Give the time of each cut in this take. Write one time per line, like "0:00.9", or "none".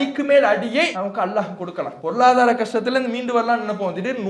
0:00.9
0:01.9